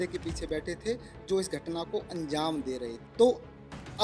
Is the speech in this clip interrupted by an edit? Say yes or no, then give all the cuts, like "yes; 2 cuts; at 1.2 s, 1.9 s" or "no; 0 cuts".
yes; 1 cut; at 3.0 s